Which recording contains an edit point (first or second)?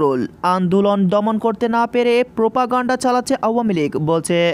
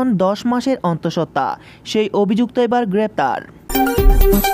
second